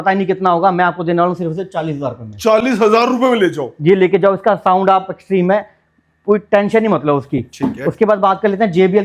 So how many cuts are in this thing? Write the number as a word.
zero